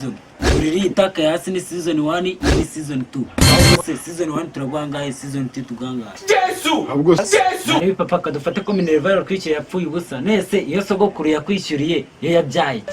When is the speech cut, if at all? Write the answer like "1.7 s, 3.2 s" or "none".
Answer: 7.2 s